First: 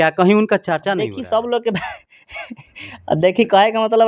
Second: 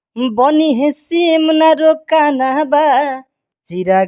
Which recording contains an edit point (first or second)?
first